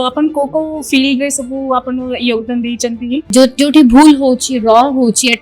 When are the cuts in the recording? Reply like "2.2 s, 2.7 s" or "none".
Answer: 3.3 s